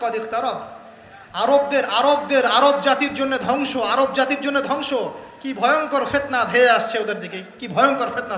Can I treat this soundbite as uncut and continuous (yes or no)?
yes